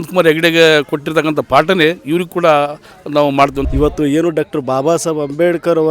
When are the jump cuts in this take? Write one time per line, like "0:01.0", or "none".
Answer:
0:03.7